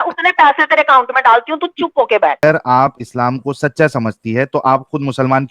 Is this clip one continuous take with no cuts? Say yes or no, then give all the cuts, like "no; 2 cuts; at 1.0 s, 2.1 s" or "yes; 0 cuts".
no; 1 cut; at 2.4 s